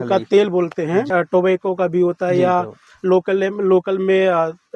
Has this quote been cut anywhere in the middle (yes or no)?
yes